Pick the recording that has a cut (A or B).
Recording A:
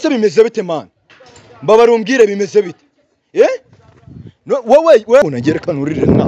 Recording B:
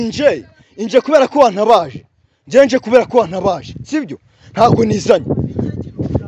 A